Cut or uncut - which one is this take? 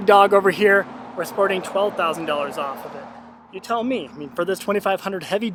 uncut